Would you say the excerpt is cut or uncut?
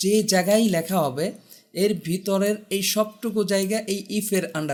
uncut